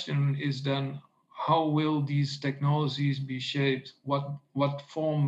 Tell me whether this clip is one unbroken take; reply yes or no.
yes